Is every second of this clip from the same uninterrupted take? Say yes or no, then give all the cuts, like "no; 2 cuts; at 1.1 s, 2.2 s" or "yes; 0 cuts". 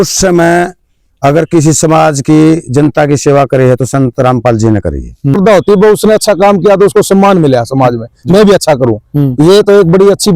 no; 1 cut; at 5.4 s